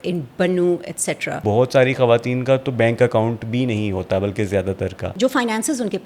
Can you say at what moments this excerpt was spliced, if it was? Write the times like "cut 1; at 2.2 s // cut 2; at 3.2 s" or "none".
cut 1; at 1.4 s // cut 2; at 5.2 s